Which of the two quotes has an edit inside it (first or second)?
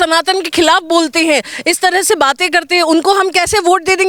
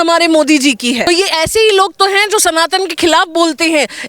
second